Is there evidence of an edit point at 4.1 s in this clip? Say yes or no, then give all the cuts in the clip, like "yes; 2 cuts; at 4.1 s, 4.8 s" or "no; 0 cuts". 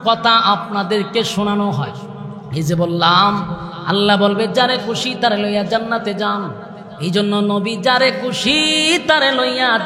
no; 0 cuts